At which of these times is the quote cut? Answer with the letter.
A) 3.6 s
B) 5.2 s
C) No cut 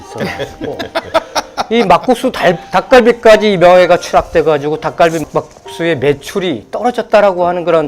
B